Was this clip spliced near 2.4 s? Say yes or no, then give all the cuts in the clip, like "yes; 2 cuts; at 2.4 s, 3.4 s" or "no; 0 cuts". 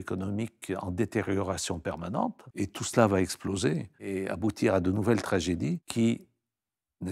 yes; 3 cuts; at 2.4 s, 4.0 s, 5.8 s